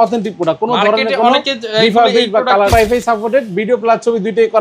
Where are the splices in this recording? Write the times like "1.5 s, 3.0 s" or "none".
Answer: 2.7 s